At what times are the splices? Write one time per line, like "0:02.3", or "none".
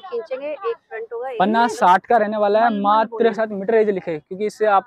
0:03.4

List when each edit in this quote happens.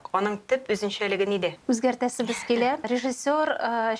0:01.6
0:02.9

